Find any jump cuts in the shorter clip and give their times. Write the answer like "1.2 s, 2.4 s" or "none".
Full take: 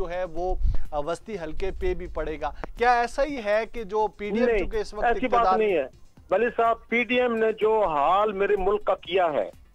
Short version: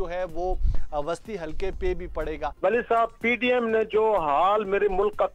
2.4 s